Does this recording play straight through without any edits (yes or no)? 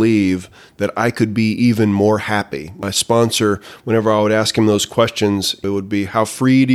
no